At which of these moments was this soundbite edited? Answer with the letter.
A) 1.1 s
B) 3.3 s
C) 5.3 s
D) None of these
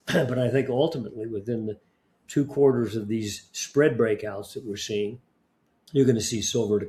D